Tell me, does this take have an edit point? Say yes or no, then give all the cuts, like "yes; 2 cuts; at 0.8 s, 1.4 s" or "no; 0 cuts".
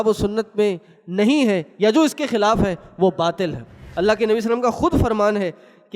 yes; 1 cut; at 3.8 s